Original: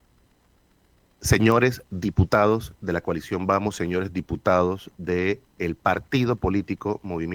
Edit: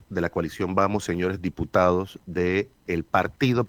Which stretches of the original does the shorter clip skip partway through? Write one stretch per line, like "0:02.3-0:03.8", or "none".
none